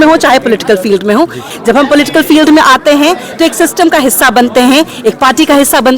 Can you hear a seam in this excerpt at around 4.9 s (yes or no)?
no